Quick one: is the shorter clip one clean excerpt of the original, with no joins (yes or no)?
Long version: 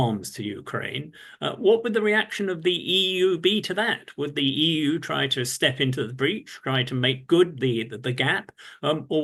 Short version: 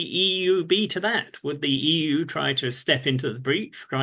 yes